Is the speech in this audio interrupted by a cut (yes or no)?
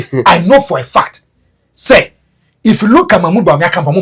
no